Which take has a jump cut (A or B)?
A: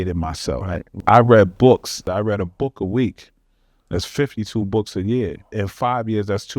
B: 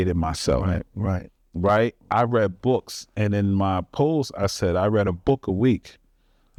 A